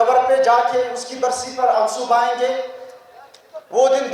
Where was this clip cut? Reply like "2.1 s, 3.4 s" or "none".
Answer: none